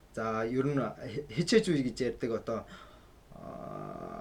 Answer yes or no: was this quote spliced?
no